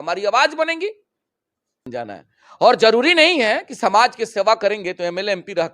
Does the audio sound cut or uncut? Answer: cut